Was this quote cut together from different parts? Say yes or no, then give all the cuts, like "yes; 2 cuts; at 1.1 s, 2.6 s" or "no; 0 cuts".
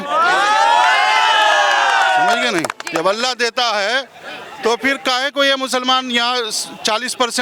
no; 0 cuts